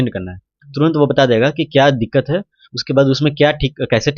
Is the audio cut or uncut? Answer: uncut